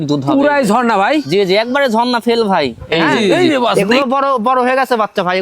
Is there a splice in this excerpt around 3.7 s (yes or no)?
yes